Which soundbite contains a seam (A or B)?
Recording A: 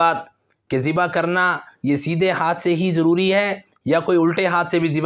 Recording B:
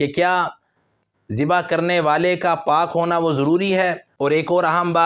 B